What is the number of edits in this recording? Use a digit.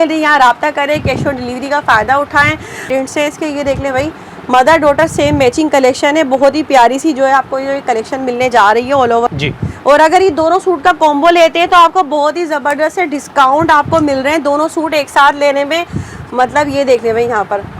2